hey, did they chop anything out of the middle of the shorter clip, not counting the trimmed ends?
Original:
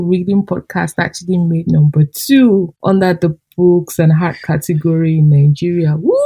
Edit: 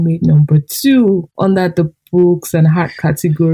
no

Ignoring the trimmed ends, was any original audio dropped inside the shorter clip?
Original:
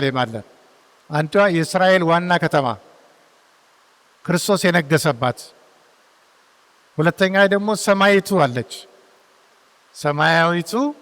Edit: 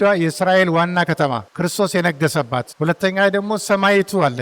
yes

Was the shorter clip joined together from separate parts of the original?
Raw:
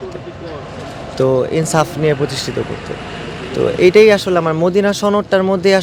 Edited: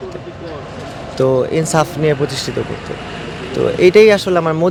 no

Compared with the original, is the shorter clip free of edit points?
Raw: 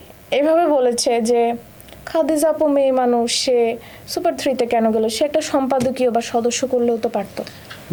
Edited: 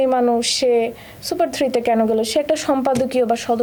yes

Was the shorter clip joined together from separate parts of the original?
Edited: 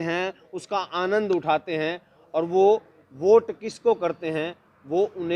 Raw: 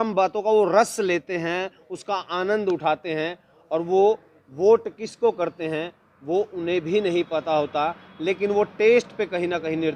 no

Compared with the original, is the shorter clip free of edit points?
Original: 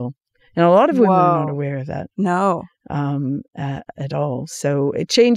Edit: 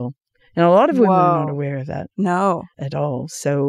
no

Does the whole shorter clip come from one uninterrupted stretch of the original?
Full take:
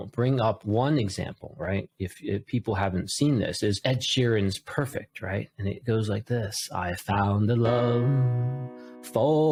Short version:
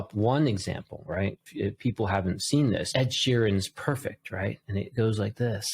no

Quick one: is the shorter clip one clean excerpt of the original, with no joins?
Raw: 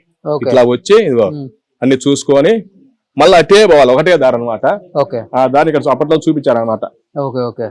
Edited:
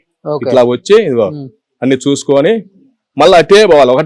yes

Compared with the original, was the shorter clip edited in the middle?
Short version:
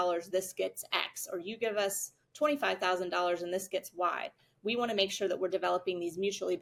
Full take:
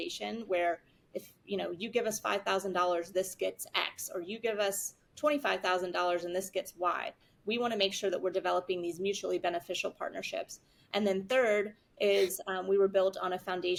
no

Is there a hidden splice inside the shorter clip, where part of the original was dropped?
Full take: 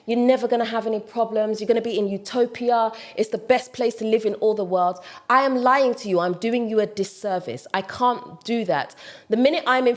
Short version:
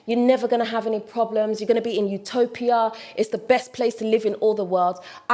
no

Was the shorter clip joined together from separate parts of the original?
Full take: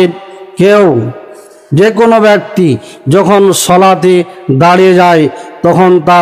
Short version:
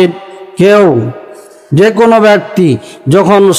no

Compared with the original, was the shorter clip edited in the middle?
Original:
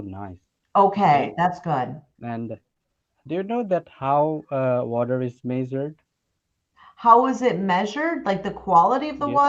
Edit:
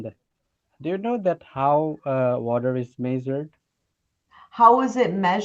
no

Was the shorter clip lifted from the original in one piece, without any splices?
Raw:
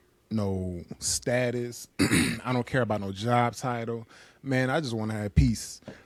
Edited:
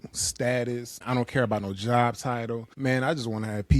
no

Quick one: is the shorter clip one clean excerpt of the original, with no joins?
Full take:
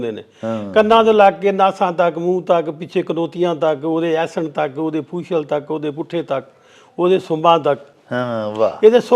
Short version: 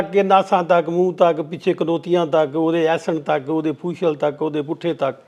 yes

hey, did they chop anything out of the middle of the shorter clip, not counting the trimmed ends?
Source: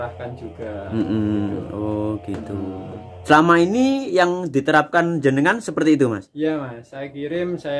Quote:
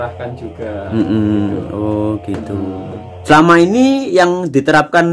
no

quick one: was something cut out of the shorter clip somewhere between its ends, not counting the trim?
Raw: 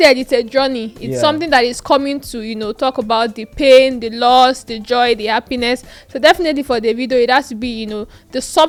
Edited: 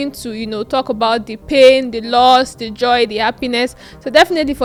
no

